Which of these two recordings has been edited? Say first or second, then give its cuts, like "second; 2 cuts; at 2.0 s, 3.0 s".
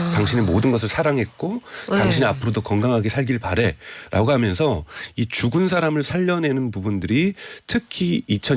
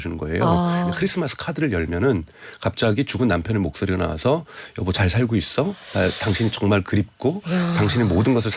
second; 1 cut; at 0.9 s